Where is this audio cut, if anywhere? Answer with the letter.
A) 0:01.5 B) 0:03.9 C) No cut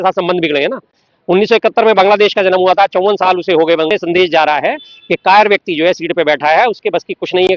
B